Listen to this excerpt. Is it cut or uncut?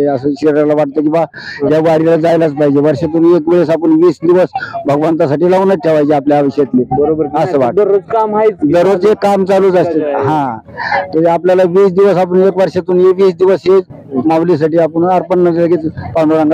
uncut